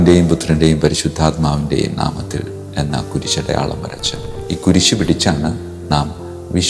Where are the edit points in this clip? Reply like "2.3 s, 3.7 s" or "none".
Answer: 4.3 s